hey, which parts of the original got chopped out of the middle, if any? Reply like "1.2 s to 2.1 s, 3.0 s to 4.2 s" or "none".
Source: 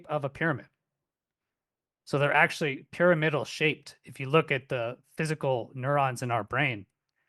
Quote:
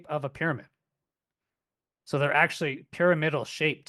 none